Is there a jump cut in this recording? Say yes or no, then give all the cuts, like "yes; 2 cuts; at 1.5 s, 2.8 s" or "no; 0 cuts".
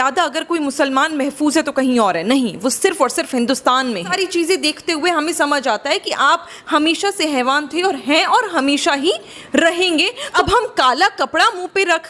yes; 2 cuts; at 4.1 s, 10.3 s